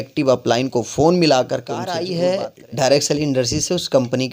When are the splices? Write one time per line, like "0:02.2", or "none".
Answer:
0:02.0